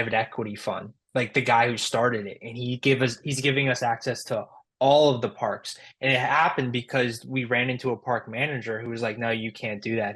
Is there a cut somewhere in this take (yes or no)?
no